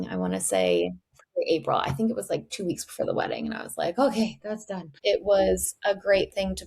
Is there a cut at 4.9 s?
yes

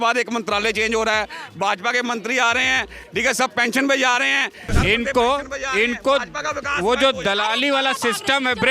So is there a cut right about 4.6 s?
yes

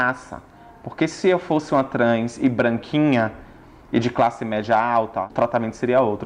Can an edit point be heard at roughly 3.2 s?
no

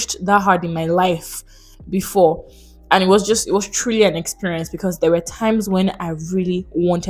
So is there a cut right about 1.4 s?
no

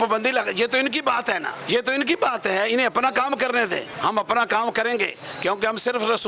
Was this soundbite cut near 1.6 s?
yes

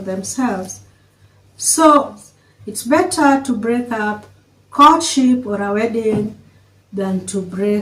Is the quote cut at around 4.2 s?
no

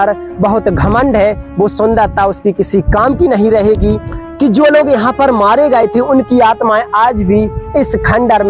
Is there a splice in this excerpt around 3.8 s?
yes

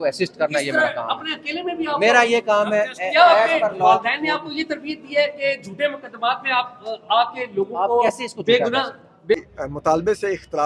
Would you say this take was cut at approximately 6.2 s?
no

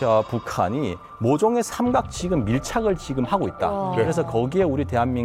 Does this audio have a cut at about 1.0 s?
no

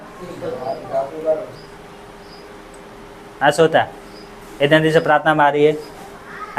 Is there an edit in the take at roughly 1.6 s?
yes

